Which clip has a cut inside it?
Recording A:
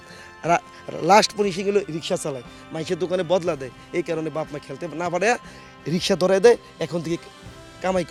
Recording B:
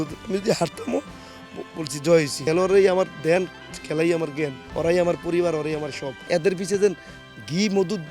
B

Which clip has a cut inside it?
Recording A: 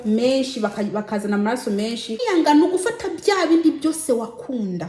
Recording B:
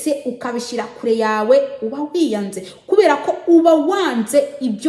A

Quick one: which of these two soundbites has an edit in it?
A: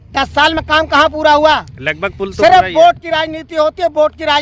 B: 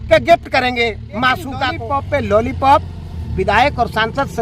B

